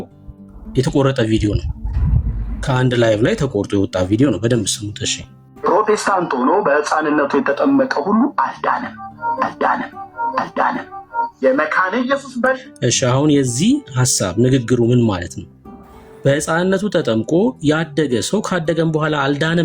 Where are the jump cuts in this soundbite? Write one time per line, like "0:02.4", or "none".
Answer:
none